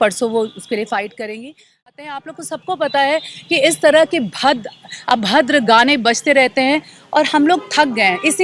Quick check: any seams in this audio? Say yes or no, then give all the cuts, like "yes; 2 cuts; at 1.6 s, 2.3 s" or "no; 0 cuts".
yes; 1 cut; at 2.2 s